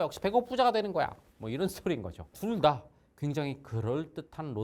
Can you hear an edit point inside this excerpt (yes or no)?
no